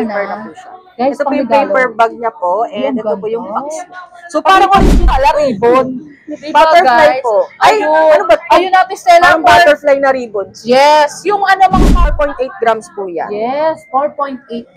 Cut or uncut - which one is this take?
cut